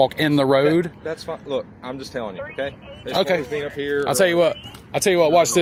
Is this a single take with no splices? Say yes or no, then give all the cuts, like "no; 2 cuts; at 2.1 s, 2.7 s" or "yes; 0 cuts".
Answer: yes; 0 cuts